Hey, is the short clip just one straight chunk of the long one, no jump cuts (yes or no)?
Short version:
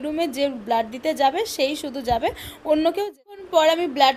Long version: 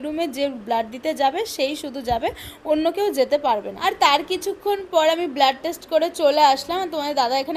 no